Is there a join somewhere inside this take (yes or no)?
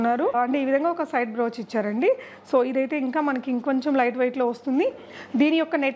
no